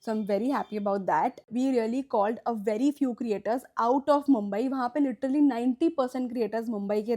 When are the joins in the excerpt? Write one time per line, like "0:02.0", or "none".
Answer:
0:01.4